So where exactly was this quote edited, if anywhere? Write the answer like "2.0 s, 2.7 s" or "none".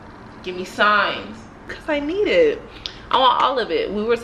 1.8 s